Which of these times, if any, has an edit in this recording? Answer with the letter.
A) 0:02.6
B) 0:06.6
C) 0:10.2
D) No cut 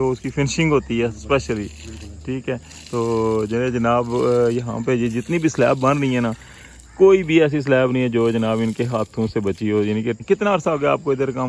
C